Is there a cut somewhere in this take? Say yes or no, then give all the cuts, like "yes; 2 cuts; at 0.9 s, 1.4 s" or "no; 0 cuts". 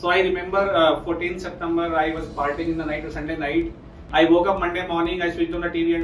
no; 0 cuts